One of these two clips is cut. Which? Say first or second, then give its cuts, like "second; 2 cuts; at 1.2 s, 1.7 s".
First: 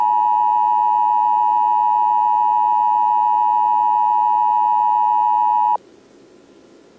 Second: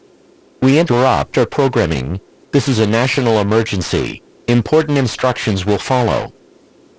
first; 1 cut; at 5.7 s